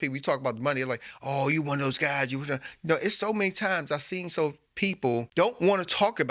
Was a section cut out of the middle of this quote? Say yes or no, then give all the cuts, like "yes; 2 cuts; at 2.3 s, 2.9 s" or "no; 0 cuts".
yes; 1 cut; at 5.3 s